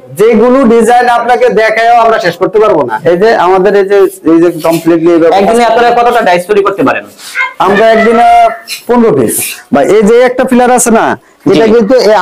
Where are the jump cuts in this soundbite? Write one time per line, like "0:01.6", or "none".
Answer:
0:02.9
0:09.5